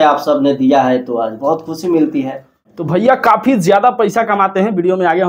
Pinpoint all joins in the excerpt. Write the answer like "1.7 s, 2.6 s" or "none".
2.8 s